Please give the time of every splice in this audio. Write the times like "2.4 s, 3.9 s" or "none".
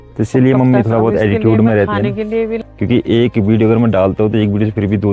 2.6 s